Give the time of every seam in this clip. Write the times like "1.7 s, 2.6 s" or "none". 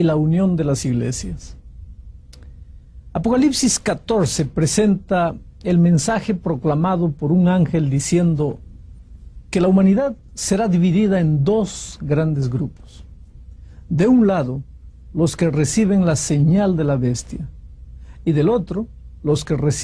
18.5 s